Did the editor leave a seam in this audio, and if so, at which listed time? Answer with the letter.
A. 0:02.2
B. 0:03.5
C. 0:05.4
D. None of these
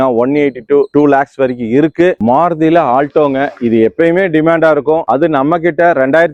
D